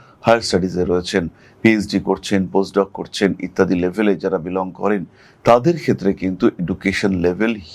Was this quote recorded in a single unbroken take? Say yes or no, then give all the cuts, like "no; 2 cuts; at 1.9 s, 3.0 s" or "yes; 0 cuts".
yes; 0 cuts